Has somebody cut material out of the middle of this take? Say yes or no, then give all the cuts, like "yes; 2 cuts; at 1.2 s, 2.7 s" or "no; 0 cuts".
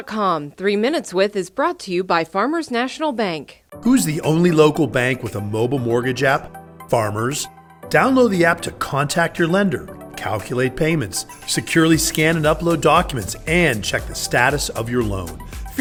no; 0 cuts